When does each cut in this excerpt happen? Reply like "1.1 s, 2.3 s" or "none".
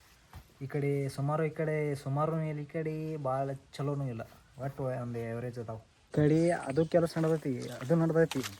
5.9 s